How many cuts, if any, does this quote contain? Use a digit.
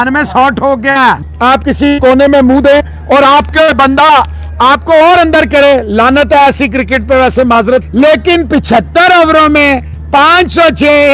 2